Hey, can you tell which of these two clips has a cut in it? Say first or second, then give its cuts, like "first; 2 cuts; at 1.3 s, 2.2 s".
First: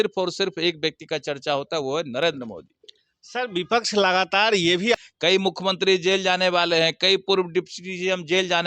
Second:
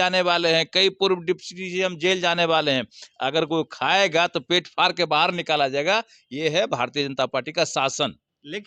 first; 1 cut; at 5.0 s